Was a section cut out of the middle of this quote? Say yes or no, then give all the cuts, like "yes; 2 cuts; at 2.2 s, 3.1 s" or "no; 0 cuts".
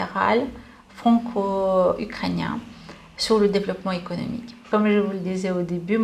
yes; 1 cut; at 4.6 s